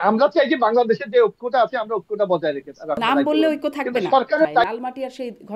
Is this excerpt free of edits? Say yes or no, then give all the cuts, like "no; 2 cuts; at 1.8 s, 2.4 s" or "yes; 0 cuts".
no; 2 cuts; at 3.0 s, 4.6 s